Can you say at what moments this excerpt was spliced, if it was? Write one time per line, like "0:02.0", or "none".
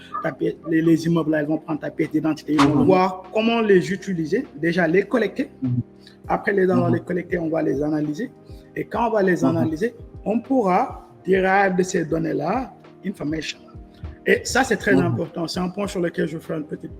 0:02.6